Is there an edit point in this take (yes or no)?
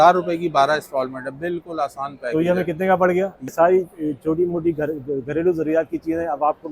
yes